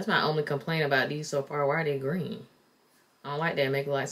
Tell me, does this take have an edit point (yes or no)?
no